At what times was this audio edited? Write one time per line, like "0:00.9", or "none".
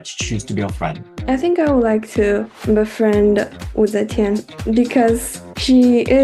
0:04.5